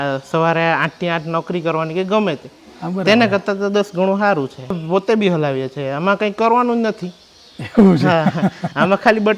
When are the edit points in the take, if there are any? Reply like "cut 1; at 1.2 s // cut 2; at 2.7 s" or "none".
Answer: cut 1; at 4.8 s